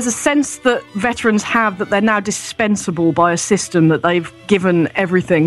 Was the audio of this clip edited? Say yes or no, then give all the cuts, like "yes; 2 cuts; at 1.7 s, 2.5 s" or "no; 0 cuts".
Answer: yes; 2 cuts; at 0.9 s, 4.4 s